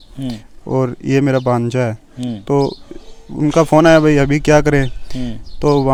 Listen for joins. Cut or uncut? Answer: uncut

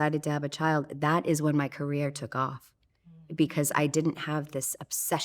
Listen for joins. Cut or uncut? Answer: uncut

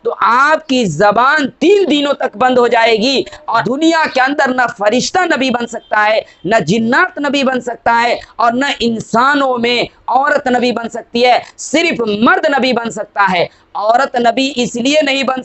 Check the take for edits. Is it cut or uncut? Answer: cut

